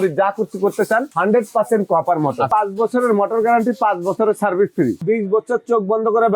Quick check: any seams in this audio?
yes; 3 cuts; at 1.1 s, 2.5 s, 5.0 s

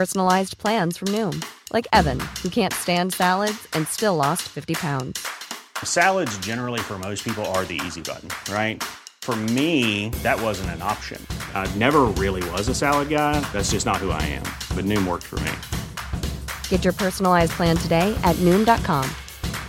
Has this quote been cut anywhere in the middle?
no; 0 cuts

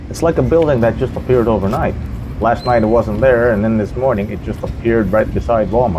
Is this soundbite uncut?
yes; 0 cuts

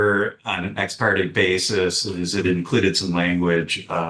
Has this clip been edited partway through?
no; 0 cuts

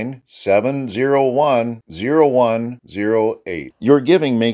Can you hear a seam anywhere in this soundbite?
no; 0 cuts

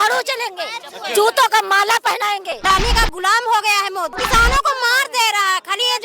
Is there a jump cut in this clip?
yes; 2 cuts; at 2.6 s, 4.2 s

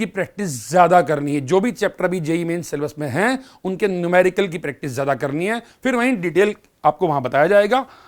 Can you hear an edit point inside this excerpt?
no; 0 cuts

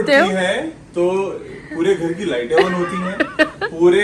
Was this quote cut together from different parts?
no; 0 cuts

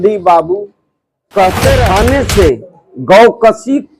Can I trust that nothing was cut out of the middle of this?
no; 1 cut; at 1.9 s

